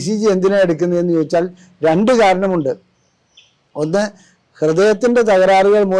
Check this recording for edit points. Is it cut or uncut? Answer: uncut